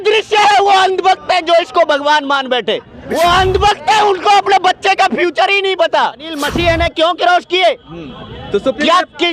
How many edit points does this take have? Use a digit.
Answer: 2